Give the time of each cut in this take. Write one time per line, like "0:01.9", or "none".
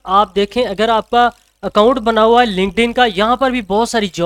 none